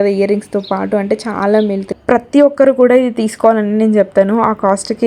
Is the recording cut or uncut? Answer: cut